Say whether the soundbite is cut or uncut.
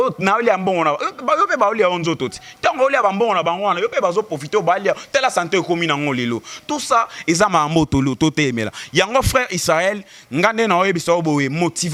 uncut